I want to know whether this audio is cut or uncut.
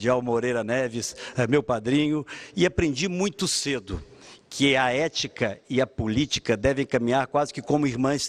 uncut